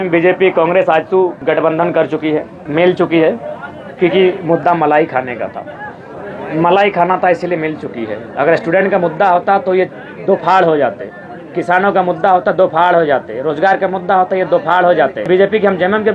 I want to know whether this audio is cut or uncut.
cut